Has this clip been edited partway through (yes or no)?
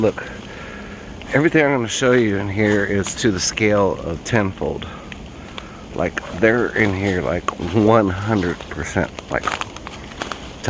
no